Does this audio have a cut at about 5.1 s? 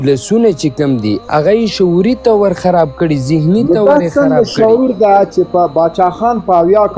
no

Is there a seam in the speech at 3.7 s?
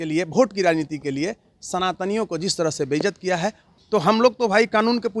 yes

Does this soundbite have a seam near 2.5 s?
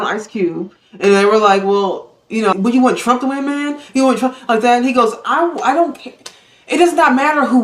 yes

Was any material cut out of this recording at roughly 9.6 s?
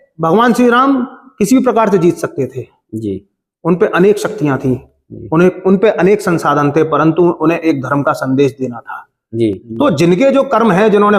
yes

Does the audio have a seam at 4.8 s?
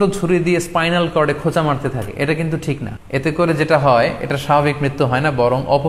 no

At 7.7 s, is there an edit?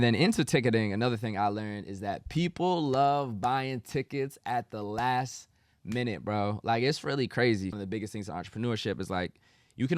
yes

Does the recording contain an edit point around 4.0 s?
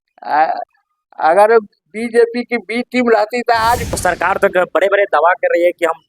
yes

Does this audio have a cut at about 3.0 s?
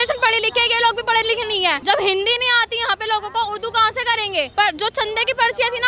no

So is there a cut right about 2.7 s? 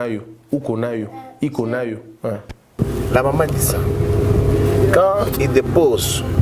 yes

